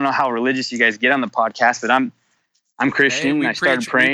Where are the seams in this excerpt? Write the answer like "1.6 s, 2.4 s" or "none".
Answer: none